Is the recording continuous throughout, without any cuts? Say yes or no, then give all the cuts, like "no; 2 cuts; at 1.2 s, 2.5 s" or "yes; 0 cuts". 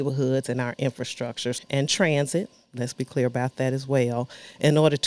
no; 1 cut; at 1.6 s